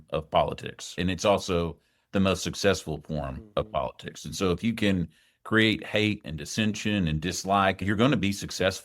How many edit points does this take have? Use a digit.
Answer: 2